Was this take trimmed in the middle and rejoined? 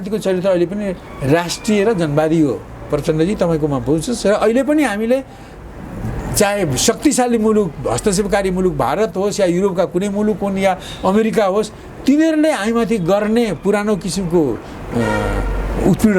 no; 0 cuts

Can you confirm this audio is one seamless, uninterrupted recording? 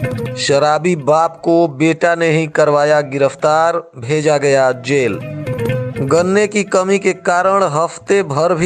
yes; 0 cuts

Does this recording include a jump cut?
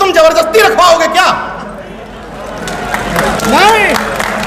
no; 0 cuts

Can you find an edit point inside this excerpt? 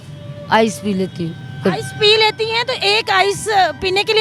no; 0 cuts

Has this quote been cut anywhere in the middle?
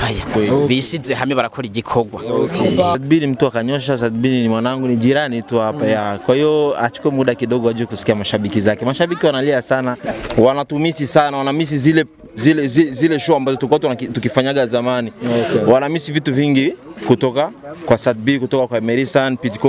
yes; 2 cuts; at 3.0 s, 10.0 s

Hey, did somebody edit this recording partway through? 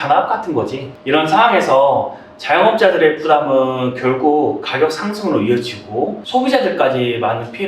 yes; 1 cut; at 6.2 s

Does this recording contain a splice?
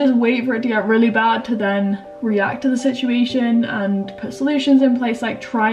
no; 0 cuts

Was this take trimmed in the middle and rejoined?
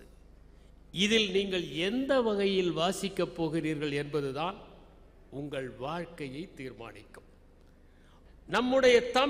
yes; 1 cut; at 8.2 s

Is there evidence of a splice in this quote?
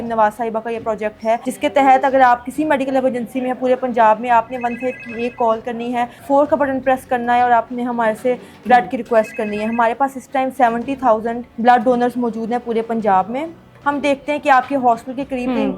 yes; 4 cuts; at 1.5 s, 6.2 s, 11.4 s, 13.7 s

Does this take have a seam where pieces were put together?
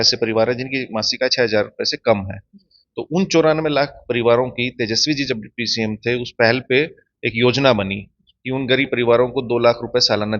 no; 0 cuts

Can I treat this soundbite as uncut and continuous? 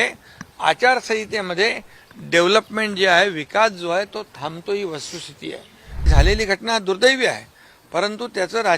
no; 1 cut; at 6.1 s

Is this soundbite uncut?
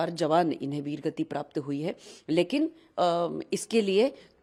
yes; 0 cuts

